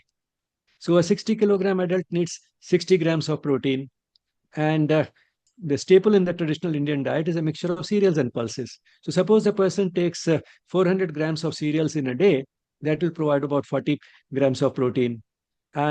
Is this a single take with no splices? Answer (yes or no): no